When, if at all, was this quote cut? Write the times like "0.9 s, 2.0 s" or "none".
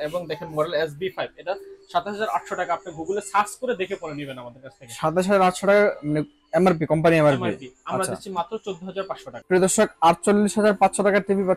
9.3 s